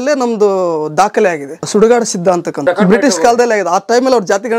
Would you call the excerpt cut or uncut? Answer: cut